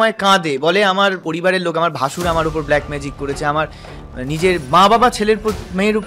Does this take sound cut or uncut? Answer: cut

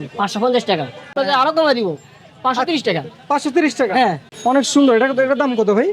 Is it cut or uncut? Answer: cut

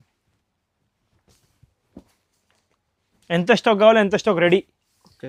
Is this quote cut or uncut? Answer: uncut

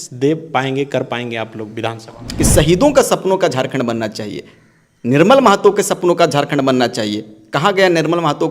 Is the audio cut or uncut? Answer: cut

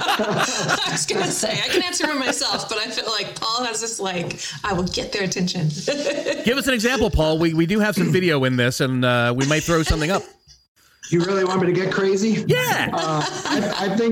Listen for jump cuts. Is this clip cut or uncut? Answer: uncut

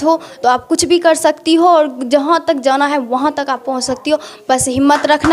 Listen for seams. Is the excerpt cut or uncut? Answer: uncut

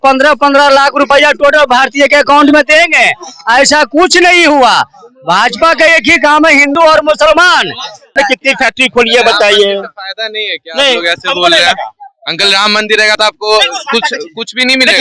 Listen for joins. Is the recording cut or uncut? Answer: cut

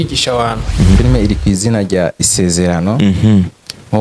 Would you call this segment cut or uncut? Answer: cut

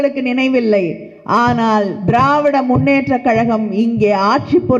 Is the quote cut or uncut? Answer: uncut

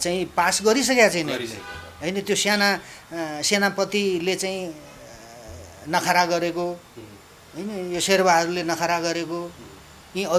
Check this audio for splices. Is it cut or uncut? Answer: uncut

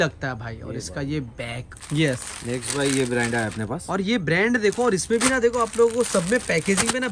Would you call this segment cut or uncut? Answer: cut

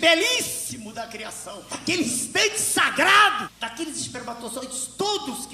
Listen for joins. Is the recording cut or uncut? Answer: cut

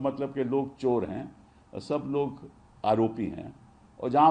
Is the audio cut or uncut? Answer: uncut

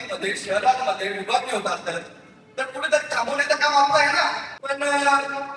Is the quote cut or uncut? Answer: cut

